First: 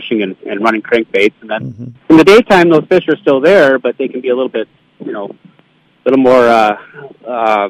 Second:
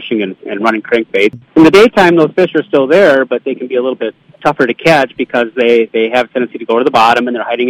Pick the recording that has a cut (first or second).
second